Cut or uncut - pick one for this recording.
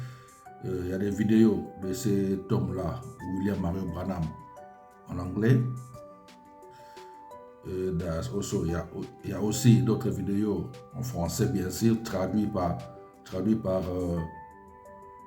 cut